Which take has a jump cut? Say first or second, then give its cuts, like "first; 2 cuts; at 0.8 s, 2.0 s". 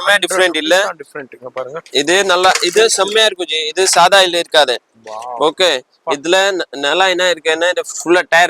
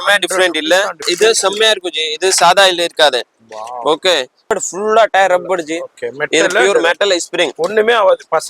second; 2 cuts; at 1.1 s, 4.5 s